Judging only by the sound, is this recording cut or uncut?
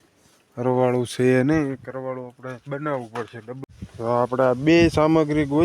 cut